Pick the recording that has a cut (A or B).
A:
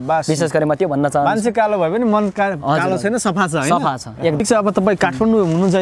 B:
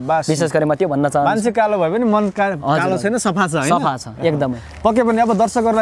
A